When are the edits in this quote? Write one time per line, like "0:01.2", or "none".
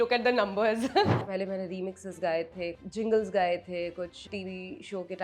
0:01.2
0:02.8
0:04.2